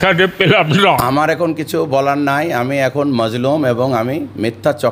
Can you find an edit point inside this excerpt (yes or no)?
yes